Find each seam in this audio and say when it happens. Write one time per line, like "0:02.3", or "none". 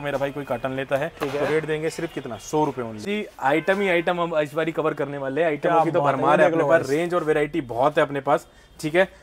0:03.0